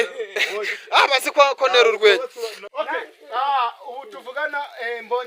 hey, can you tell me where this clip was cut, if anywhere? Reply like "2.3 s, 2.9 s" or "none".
2.6 s